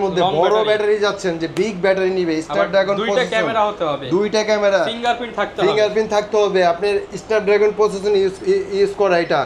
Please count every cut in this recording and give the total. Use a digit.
0